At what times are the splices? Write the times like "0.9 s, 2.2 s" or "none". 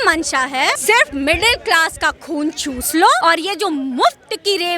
0.8 s, 3.2 s